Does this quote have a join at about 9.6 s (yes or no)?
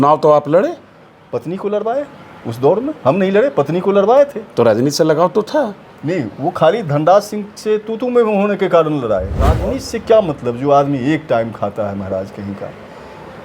yes